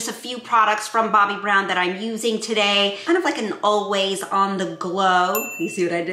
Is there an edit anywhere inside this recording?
no; 0 cuts

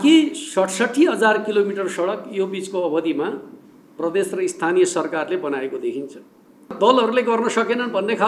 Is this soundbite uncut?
no; 1 cut; at 6.7 s

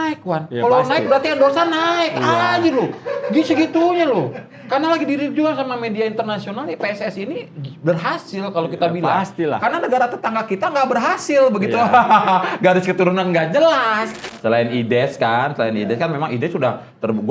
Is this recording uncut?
no; 1 cut; at 14.2 s

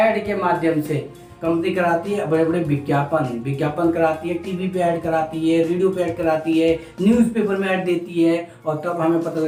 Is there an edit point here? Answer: no; 0 cuts

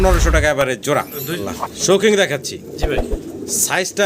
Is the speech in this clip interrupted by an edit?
yes; 1 cut; at 1.3 s

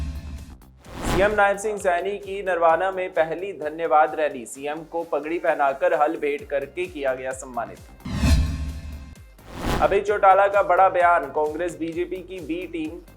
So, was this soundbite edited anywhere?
yes; 1 cut; at 1.0 s

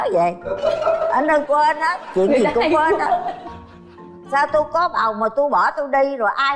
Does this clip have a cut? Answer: no; 0 cuts

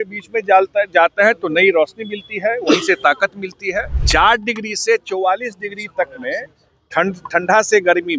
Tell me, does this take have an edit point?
yes; 1 cut; at 3.9 s

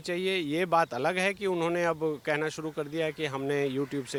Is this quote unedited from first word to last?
yes; 0 cuts

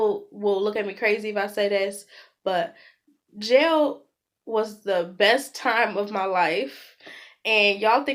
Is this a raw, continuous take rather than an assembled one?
yes; 0 cuts

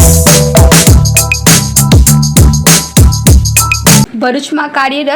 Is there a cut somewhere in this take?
yes; 1 cut; at 4.1 s

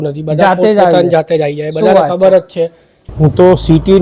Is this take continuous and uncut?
no; 1 cut; at 3.0 s

